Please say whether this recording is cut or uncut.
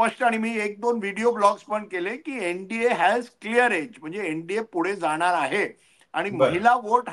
uncut